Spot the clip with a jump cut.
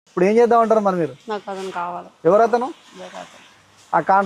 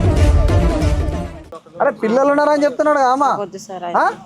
second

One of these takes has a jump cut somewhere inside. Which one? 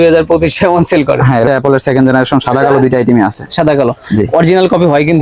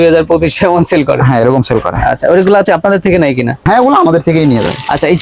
first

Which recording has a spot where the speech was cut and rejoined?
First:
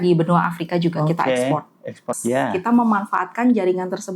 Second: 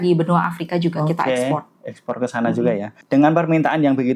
first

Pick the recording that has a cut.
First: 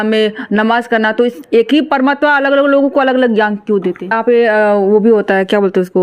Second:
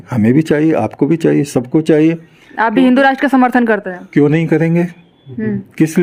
first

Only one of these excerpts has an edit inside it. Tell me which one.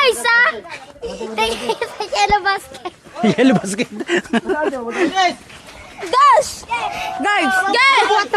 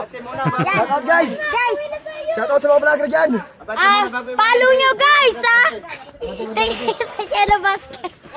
first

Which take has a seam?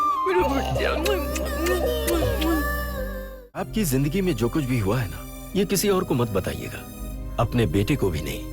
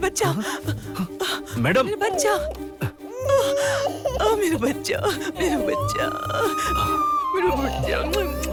first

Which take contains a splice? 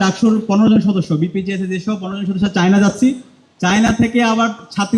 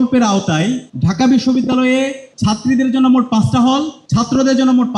second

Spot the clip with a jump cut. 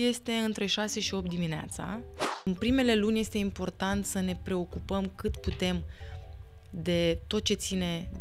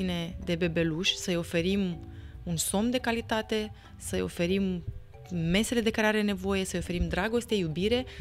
first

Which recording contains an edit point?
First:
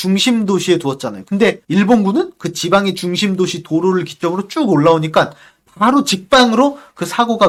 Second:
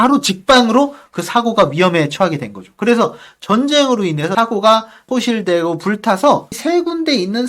second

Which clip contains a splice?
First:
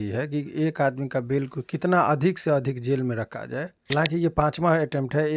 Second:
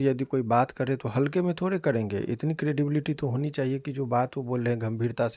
first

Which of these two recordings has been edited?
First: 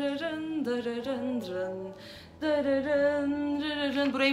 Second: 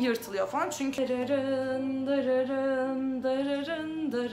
second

